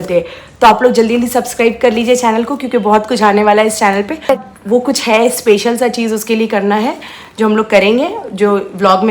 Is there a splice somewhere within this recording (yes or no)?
yes